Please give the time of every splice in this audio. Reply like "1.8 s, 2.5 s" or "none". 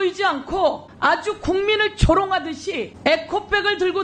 0.9 s, 2.9 s